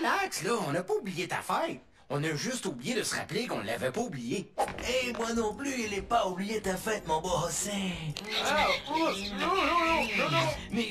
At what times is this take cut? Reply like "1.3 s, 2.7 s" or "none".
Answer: none